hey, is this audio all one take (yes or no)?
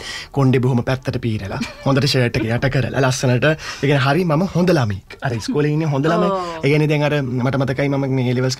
yes